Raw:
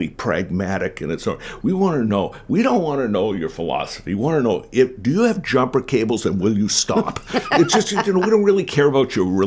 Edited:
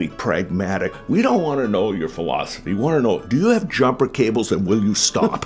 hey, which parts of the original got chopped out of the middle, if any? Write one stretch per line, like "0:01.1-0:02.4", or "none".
0:01.0-0:02.4
0:04.6-0:05.0